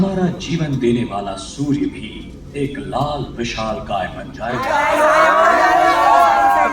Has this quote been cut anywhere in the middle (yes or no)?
yes